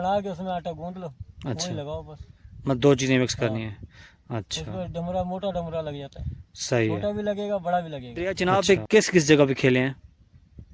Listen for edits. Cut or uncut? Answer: cut